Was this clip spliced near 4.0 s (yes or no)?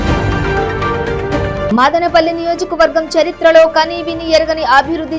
no